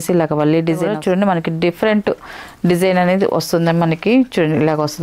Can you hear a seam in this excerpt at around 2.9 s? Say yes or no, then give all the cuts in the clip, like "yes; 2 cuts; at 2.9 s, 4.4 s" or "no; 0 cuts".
no; 1 cut; at 0.9 s